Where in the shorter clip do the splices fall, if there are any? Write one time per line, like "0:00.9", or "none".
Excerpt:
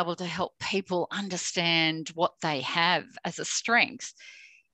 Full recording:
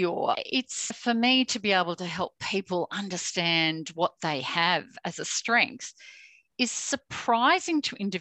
none